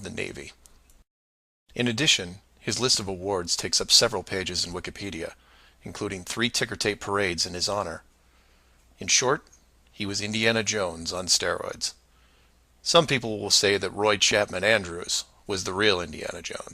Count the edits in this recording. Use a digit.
1